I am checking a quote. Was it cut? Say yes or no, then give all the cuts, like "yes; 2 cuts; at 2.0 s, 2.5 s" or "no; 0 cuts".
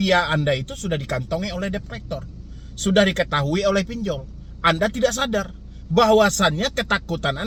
no; 0 cuts